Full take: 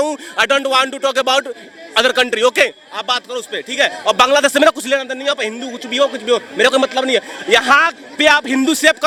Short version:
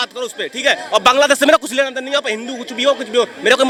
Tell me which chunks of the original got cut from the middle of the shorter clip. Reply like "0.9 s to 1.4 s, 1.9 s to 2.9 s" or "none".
none